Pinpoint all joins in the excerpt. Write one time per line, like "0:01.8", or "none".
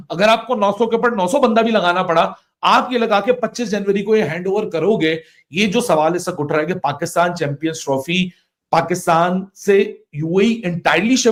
none